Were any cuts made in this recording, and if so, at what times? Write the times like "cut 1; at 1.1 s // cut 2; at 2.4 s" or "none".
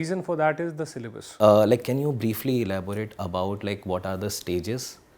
cut 1; at 1.2 s